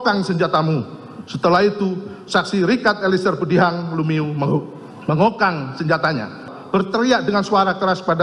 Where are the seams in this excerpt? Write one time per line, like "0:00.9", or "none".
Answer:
0:06.5